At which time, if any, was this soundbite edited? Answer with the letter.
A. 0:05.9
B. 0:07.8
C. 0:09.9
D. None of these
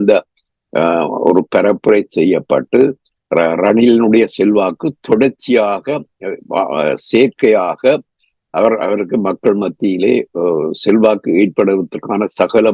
D